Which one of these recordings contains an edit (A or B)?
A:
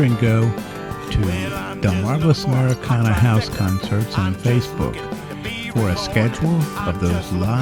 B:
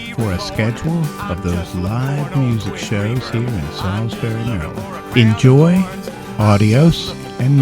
B